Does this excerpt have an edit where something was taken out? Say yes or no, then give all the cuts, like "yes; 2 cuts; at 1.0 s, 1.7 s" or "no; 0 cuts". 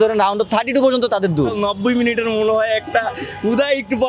yes; 1 cut; at 1.7 s